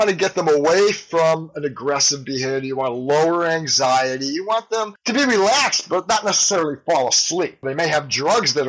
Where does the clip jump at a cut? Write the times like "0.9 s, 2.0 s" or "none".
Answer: none